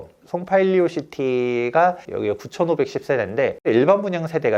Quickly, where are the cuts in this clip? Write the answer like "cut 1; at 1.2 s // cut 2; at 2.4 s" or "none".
cut 1; at 2.0 s